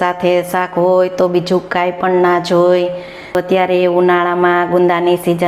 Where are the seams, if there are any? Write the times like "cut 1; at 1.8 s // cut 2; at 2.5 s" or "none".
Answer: cut 1; at 3.3 s